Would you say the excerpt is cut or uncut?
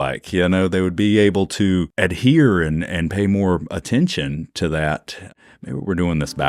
cut